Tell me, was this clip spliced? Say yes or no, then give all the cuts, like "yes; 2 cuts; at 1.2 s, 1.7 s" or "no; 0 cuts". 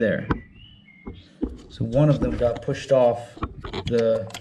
no; 0 cuts